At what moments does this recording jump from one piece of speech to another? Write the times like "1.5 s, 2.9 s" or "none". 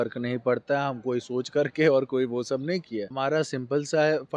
3.1 s